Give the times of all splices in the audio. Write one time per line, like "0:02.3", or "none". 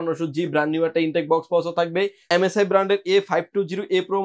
0:02.2